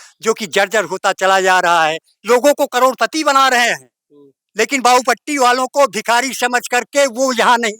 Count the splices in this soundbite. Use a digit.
1